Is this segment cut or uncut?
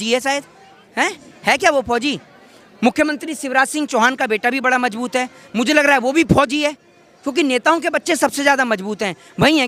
uncut